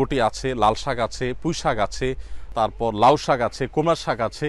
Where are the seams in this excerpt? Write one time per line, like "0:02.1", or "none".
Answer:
none

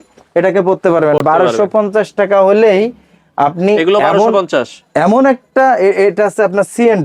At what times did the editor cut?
none

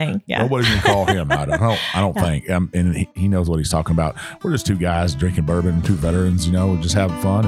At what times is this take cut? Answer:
none

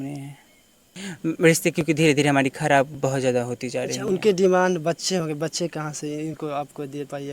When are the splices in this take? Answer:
0:01.1

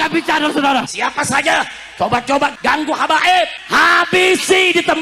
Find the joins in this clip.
0:00.9

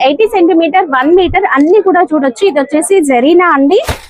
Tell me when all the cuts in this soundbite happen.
none

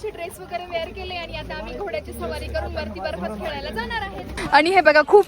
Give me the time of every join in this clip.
0:04.3

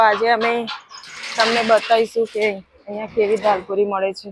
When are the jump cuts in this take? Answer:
none

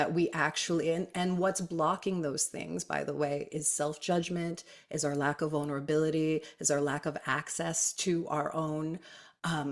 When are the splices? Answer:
none

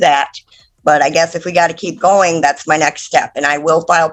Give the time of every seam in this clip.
none

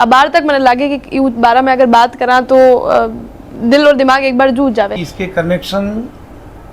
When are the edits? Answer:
0:04.9

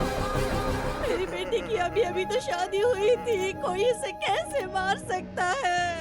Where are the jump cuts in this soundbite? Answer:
0:00.9

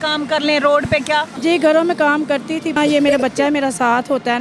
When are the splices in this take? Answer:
0:01.3
0:02.7

